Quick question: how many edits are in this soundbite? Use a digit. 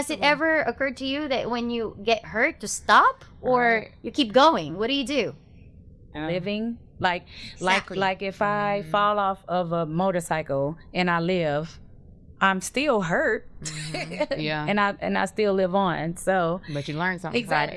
1